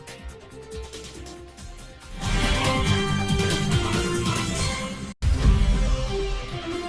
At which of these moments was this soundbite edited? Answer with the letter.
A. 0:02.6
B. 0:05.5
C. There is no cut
C